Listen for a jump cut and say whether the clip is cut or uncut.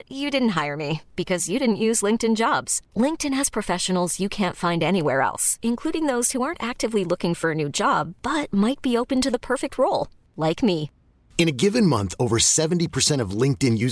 uncut